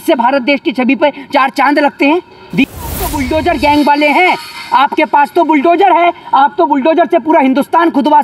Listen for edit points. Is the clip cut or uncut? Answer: cut